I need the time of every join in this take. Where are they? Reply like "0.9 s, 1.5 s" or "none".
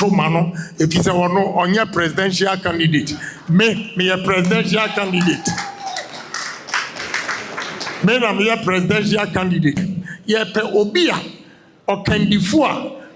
9.8 s

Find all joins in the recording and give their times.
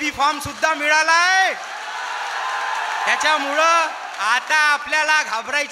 none

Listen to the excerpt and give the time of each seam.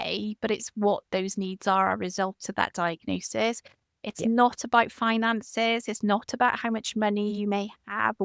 none

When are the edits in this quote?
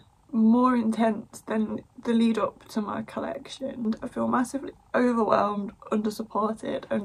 3.8 s

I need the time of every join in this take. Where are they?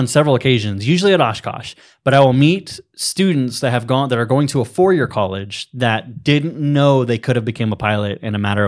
none

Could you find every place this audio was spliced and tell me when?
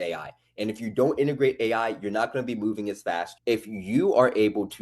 3.3 s

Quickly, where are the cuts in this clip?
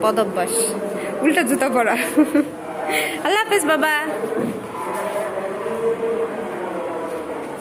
none

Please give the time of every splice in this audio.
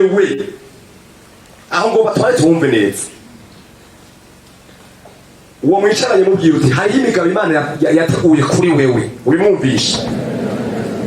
none

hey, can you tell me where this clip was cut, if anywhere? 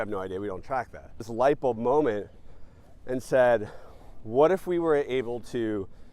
1.2 s

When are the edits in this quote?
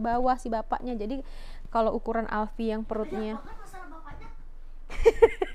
none

